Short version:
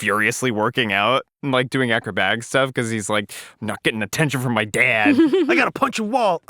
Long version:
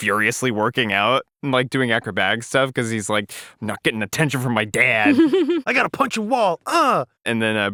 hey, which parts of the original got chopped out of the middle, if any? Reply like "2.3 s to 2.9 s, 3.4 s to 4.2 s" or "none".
5.6 s to 5.8 s